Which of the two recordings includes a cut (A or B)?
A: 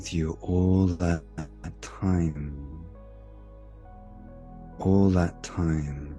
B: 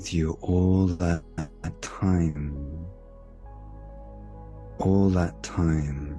B